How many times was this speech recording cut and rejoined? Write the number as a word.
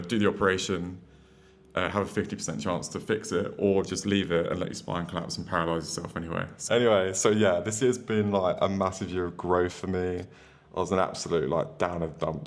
one